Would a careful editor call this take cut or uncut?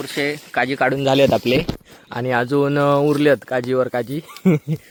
uncut